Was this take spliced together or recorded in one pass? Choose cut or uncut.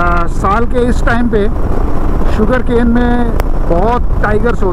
uncut